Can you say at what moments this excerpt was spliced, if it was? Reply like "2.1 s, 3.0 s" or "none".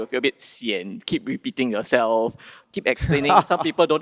2.6 s